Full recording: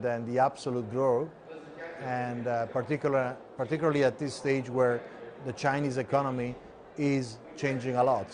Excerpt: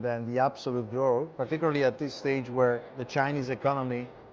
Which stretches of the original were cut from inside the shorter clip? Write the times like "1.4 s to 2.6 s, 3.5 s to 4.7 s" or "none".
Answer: 1.3 s to 3.5 s, 5.2 s to 5.4 s

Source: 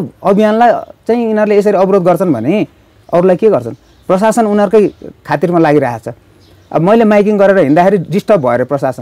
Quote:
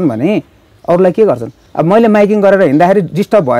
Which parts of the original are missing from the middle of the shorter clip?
3.8 s to 6.5 s

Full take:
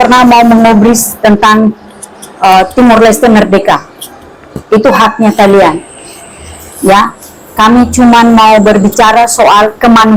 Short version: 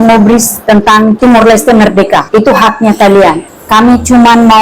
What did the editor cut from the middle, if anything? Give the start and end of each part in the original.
1.7 s to 2.7 s, 3.8 s to 4.6 s, 5.9 s to 7.4 s

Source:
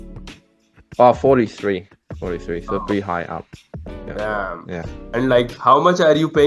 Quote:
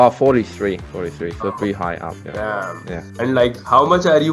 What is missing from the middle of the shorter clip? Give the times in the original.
1.9 s to 2.1 s, 3.5 s to 4.0 s, 4.9 s to 5.0 s

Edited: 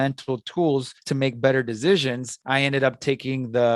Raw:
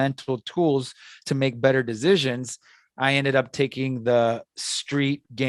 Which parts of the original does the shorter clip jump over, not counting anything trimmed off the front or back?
1.0 s to 1.2 s, 2.5 s to 2.8 s

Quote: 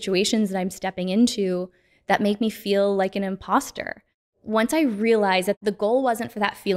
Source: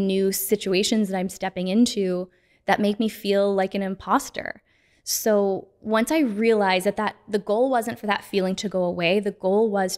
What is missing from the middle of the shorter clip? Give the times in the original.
4.9 s to 5.7 s, 7.0 s to 7.3 s

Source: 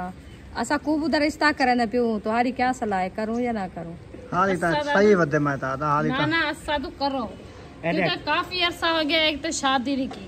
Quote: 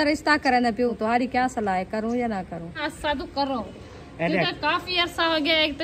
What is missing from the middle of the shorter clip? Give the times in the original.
2.1 s to 2.2 s, 4.1 s to 6.5 s

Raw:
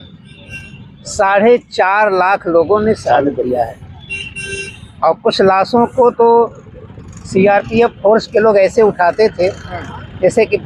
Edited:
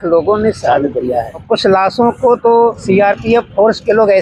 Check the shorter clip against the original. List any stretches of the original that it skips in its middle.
3.9 s to 5.2 s, 6.5 s to 7.3 s

